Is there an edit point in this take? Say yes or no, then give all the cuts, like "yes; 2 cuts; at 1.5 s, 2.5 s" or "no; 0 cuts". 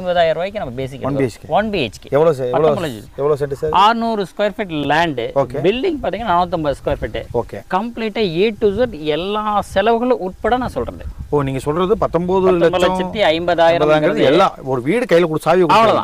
no; 0 cuts